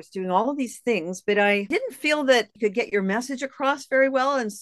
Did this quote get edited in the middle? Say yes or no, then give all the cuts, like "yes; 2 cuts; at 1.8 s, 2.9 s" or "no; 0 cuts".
yes; 1 cut; at 1.7 s